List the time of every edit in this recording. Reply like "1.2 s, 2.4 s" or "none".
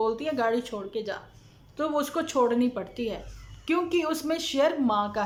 none